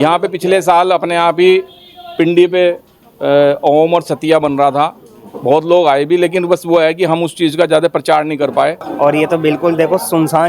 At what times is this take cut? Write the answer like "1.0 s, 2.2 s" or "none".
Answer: 8.8 s